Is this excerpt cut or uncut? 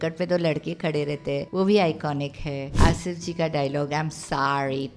cut